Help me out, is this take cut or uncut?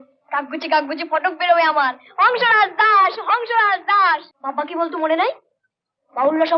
cut